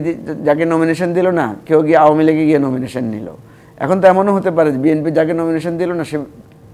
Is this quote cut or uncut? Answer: uncut